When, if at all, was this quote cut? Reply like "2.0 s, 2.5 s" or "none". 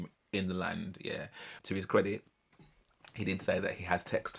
1.5 s